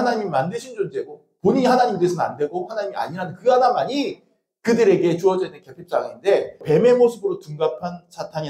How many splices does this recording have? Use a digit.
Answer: 1